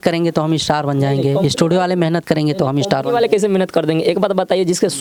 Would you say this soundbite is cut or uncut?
uncut